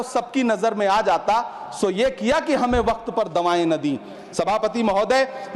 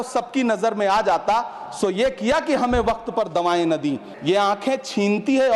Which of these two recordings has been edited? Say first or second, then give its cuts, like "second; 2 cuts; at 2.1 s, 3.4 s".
second; 1 cut; at 4.1 s